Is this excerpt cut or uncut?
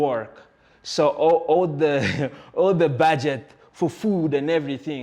uncut